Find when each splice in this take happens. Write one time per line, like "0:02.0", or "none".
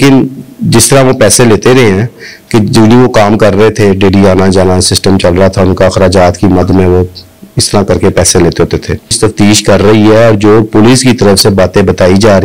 0:09.2